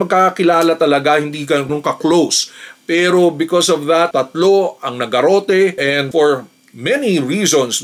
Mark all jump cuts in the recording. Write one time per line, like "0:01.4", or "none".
none